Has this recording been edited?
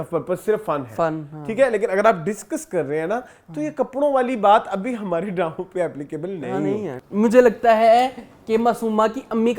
yes; 1 cut; at 7.0 s

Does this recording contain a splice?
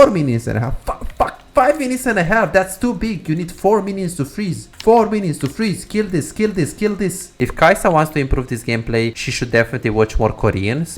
yes; 3 cuts; at 4.7 s, 7.2 s, 9.3 s

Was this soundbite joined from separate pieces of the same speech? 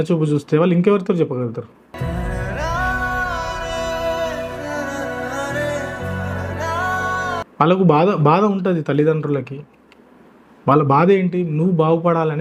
yes; 1 cut; at 7.5 s

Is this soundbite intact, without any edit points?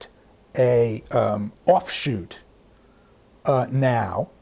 yes; 0 cuts

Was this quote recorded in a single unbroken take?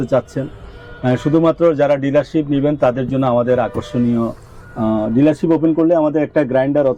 yes; 0 cuts

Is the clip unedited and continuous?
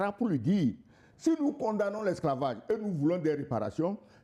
yes; 0 cuts

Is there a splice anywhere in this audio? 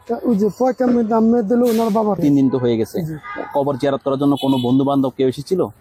yes; 1 cut; at 2.2 s

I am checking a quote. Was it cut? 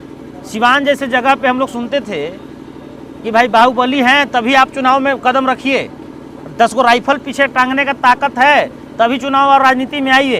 no; 0 cuts

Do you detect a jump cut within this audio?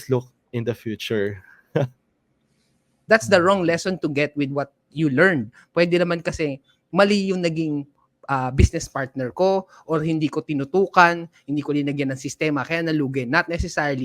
yes; 1 cut; at 3.0 s

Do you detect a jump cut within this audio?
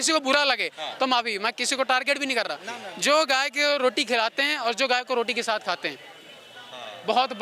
no; 0 cuts

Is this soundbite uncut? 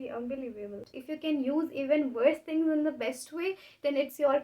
no; 1 cut; at 0.9 s

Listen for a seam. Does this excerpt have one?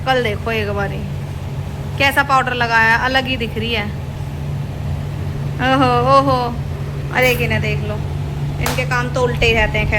no; 0 cuts

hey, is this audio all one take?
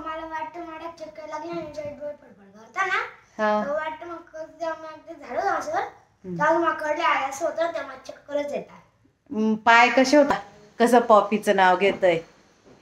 no; 1 cut; at 10.3 s

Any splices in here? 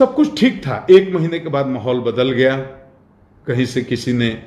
no; 0 cuts

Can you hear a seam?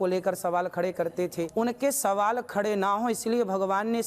yes; 1 cut; at 1.5 s

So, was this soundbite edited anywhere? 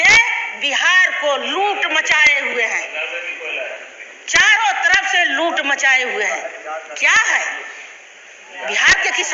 no; 0 cuts

